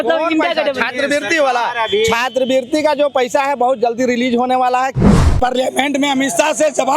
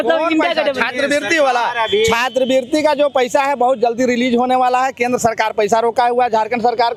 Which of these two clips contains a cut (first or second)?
first